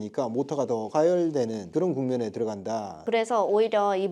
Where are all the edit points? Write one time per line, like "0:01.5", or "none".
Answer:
0:03.0